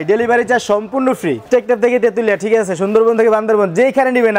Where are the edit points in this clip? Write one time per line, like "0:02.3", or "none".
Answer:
0:01.4